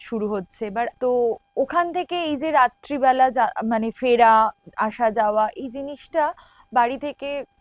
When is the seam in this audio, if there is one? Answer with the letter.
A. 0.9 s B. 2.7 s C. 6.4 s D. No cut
A